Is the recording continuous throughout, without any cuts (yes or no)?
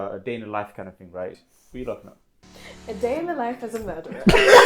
no